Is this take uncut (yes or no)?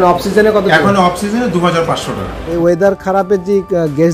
no